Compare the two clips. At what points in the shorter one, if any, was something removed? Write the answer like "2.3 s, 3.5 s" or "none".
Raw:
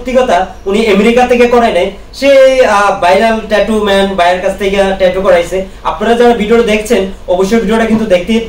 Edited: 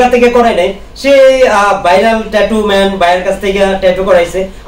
none